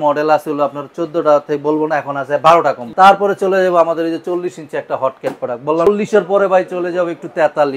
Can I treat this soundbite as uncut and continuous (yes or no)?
no